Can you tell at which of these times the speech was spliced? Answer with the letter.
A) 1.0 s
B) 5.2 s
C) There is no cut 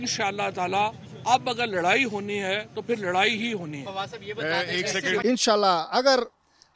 B